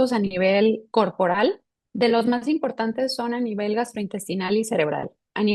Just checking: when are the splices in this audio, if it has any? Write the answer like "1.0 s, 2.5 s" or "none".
none